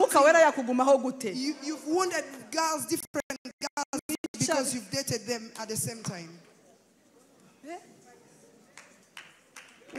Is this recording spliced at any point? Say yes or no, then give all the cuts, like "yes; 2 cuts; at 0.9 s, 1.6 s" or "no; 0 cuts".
no; 0 cuts